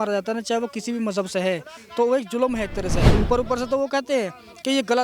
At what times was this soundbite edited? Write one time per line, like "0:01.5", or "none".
0:03.0